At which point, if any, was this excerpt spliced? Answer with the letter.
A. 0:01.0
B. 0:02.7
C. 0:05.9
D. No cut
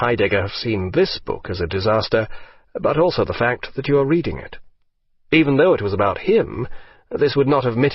D